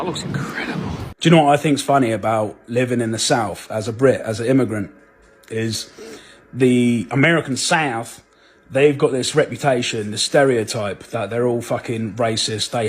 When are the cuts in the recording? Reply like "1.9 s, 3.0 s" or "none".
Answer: 1.0 s

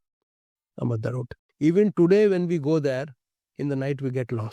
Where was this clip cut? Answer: 1.4 s

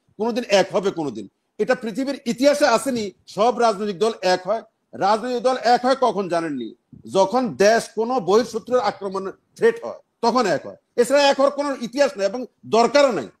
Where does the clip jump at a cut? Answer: none

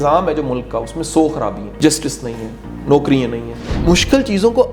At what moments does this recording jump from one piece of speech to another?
1.6 s, 3.5 s

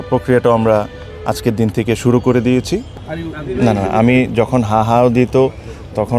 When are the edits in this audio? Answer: 2.9 s

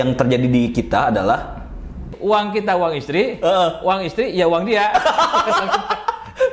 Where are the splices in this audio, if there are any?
2.1 s

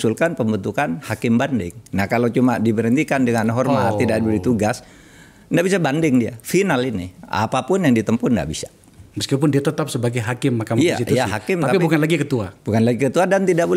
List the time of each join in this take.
none

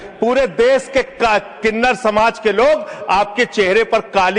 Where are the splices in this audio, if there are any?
none

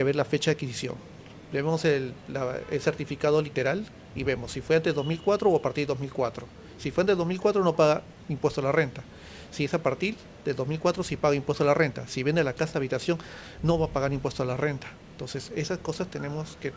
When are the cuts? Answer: none

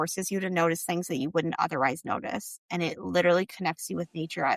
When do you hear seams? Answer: none

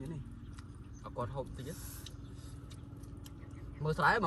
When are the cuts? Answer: none

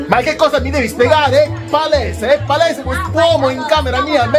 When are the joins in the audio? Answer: none

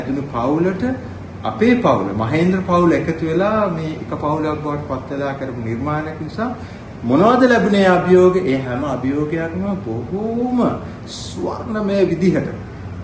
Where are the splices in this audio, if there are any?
none

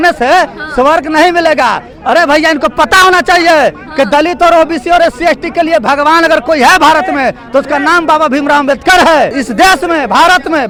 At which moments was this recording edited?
none

